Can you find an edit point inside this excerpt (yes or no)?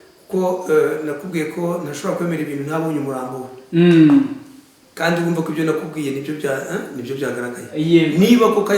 no